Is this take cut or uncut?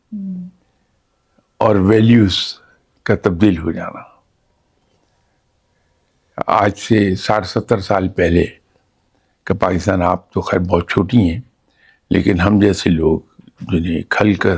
uncut